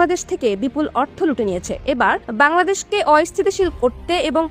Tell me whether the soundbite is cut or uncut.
uncut